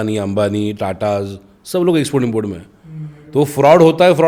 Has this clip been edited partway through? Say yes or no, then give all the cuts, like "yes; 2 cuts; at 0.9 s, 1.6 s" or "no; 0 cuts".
no; 0 cuts